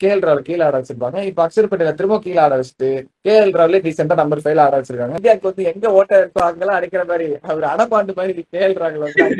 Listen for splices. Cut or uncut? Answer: cut